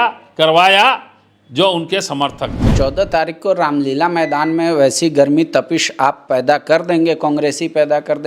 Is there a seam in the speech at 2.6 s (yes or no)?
yes